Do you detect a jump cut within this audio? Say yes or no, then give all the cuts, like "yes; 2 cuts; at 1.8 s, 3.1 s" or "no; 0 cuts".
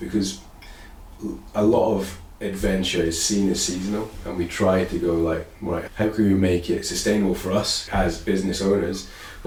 no; 0 cuts